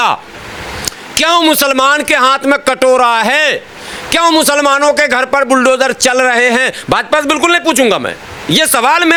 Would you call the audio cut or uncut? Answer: uncut